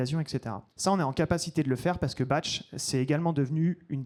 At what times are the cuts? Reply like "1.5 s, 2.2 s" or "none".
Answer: none